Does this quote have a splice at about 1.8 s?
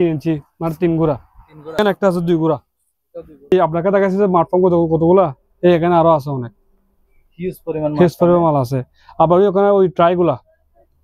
yes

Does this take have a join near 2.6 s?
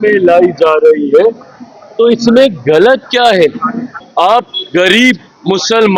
no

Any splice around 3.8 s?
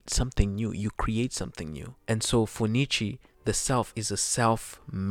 no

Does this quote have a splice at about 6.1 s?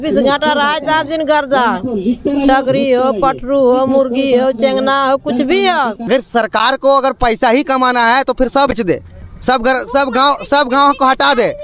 yes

